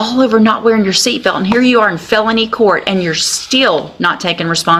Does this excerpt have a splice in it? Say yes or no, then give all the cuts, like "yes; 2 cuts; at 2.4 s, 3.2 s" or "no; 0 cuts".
no; 0 cuts